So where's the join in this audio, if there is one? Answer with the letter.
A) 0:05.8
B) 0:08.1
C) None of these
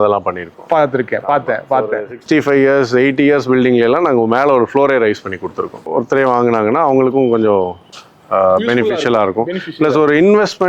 A